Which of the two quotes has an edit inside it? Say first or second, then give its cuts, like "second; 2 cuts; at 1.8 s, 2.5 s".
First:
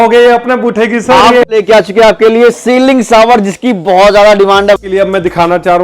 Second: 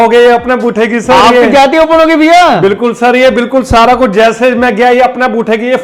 first; 2 cuts; at 1.4 s, 4.8 s